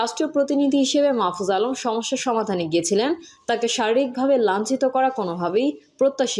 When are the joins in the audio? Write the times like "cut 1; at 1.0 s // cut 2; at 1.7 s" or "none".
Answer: none